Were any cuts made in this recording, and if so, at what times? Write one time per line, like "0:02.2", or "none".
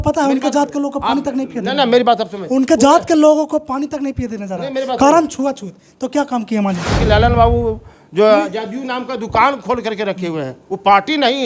0:07.0